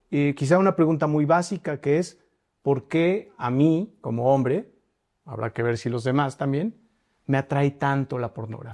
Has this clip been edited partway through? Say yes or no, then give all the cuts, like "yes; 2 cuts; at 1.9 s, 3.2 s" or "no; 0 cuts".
no; 0 cuts